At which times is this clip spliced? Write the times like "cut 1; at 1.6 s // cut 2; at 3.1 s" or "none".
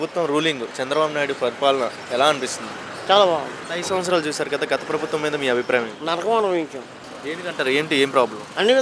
cut 1; at 3.6 s